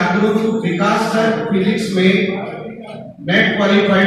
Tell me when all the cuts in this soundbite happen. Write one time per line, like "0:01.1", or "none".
none